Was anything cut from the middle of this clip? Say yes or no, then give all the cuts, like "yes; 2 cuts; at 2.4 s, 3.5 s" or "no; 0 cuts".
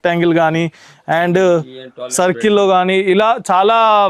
no; 0 cuts